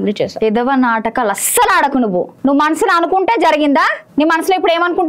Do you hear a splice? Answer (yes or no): yes